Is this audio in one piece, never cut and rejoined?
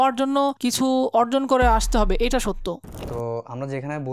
no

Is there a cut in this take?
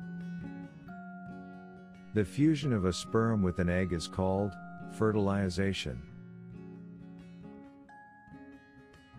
no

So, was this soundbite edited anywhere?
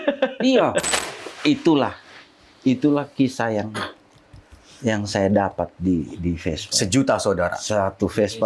yes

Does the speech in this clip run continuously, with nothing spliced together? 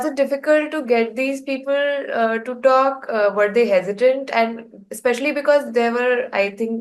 yes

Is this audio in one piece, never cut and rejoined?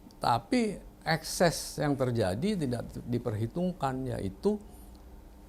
yes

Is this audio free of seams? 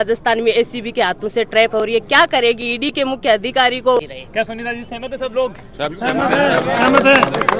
no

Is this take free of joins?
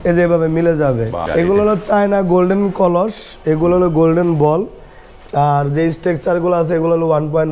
no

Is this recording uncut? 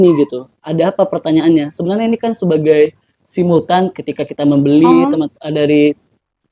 yes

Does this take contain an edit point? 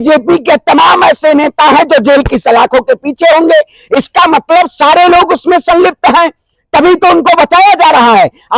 no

